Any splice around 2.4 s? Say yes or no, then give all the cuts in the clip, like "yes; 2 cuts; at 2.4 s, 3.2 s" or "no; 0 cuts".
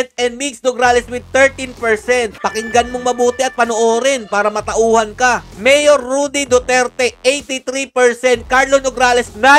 yes; 1 cut; at 2.4 s